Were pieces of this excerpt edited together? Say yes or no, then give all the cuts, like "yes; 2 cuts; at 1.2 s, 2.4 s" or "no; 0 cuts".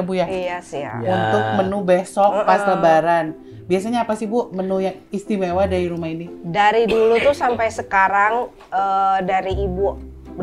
no; 0 cuts